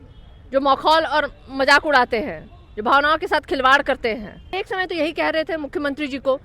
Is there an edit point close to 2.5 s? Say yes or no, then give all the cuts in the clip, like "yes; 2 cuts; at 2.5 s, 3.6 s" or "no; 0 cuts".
no; 1 cut; at 4.5 s